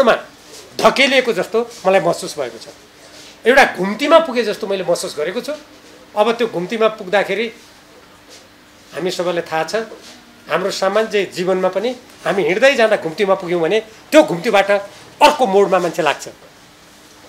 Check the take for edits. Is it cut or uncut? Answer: uncut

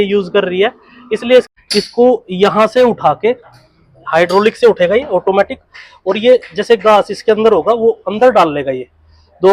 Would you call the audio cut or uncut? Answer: cut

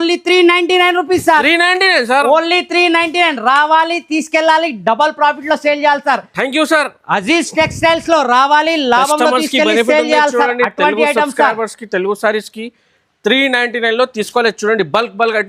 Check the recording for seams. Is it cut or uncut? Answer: uncut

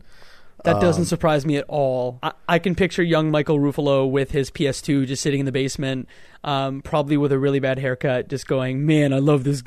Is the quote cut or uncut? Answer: cut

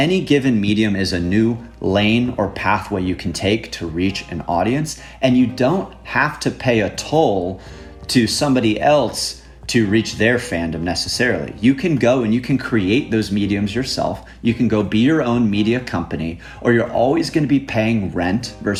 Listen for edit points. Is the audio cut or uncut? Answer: uncut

